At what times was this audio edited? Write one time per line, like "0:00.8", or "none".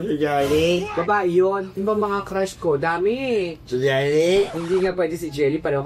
0:01.7
0:04.6